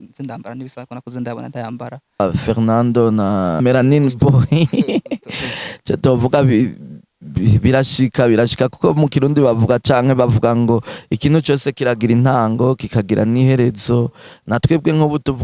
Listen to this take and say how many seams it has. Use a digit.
3